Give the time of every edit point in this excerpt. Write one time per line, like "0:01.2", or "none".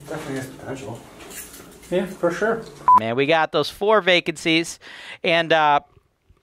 0:02.8

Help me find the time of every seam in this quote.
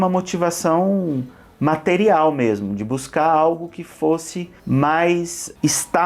none

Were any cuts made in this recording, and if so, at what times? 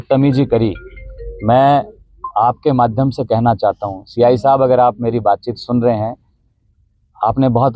none

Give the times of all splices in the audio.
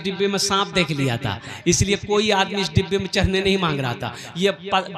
none

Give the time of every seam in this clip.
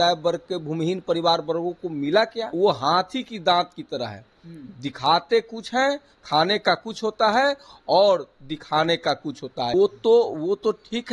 0:02.5
0:09.7

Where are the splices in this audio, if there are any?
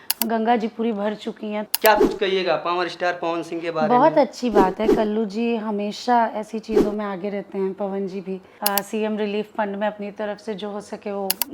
0:01.6
0:08.5

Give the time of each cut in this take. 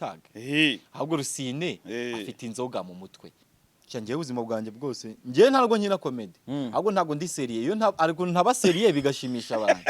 0:03.5

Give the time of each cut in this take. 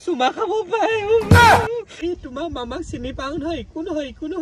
0:02.0

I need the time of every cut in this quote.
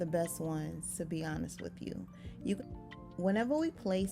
0:02.6

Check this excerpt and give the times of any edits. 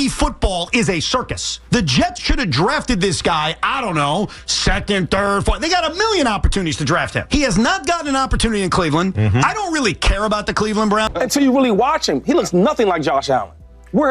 0:11.1

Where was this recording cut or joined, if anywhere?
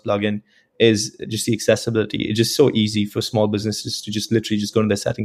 none

